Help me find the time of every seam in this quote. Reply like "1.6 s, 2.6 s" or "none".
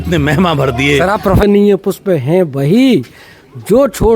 1.4 s